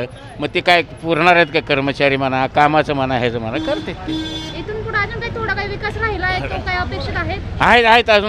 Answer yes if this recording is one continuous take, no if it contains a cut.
yes